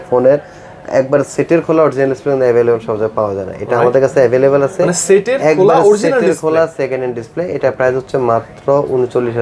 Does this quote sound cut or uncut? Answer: uncut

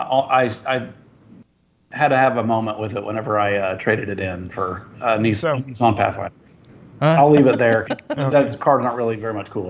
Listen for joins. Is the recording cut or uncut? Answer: cut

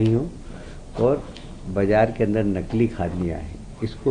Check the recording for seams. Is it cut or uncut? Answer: uncut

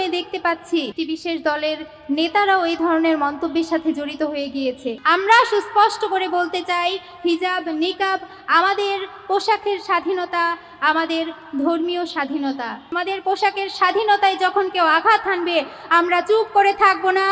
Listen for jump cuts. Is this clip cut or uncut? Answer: cut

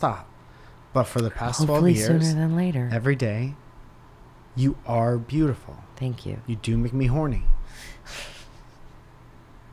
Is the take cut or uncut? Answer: uncut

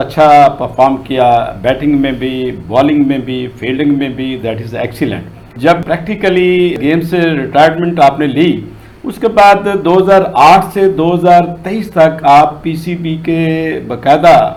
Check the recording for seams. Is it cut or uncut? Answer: uncut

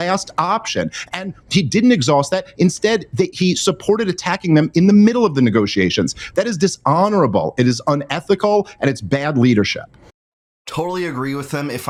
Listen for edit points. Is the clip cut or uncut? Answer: uncut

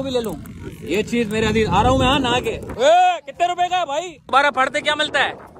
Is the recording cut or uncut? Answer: cut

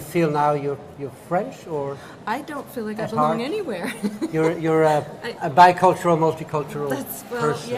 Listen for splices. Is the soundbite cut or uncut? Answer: cut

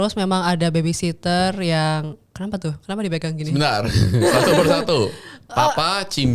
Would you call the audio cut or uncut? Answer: uncut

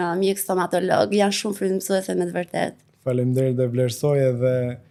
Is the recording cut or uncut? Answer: uncut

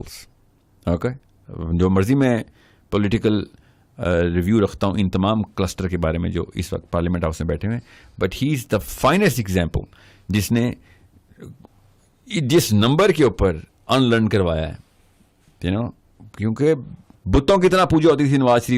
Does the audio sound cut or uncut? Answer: uncut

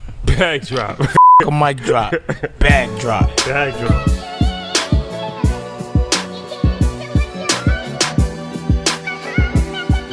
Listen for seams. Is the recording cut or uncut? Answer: uncut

